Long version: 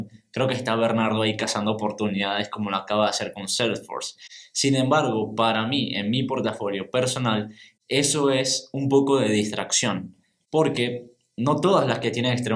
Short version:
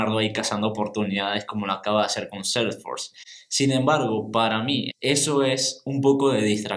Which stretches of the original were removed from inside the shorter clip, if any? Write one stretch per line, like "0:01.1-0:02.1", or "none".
0:05.9-0:07.8